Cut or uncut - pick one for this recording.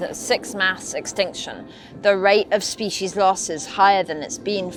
uncut